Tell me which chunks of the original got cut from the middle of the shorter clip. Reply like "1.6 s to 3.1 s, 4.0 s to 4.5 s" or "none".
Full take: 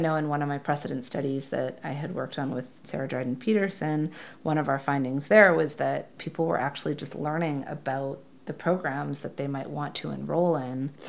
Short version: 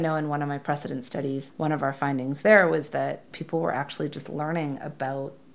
1.5 s to 4.3 s